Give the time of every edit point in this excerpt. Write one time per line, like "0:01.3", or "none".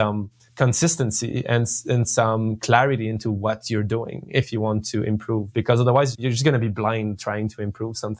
0:06.2